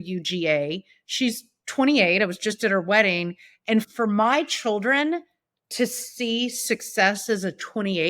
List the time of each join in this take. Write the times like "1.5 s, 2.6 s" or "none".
3.9 s